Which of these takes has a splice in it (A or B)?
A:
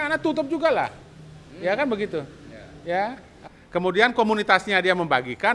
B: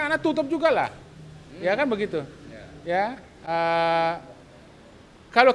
A